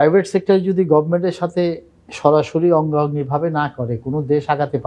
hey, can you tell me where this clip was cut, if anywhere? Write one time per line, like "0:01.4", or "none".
none